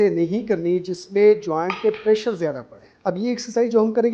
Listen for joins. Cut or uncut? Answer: cut